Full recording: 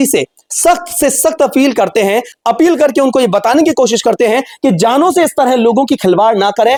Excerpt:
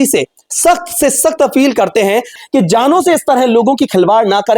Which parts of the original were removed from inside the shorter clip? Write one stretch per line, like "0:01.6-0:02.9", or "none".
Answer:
0:02.4-0:04.5